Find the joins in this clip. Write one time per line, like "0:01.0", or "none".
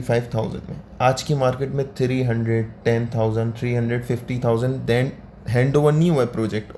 none